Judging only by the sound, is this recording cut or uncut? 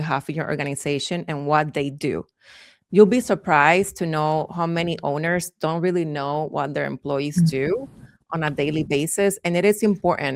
uncut